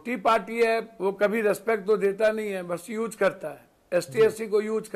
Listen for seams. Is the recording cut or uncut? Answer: cut